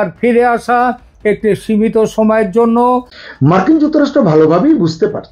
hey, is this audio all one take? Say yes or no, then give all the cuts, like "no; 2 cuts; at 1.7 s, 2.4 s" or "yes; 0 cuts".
no; 1 cut; at 3.2 s